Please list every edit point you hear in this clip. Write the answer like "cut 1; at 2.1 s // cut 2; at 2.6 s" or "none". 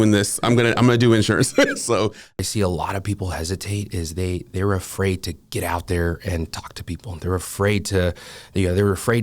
cut 1; at 2.4 s